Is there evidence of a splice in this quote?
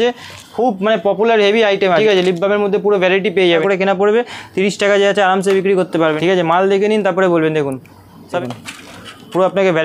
yes; 4 cuts; at 2.0 s, 3.4 s, 6.2 s, 8.4 s

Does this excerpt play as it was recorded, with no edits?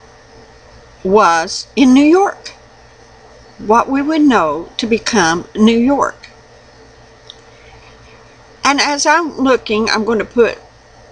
no; 1 cut; at 4.7 s

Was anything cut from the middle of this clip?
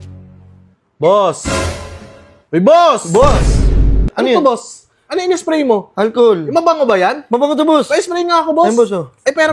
yes; 1 cut; at 4.0 s

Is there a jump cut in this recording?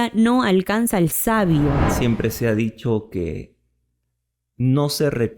yes; 1 cut; at 1.9 s

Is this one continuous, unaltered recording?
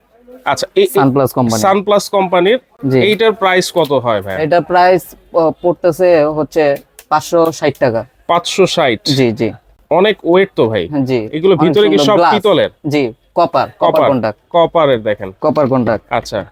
yes; 0 cuts

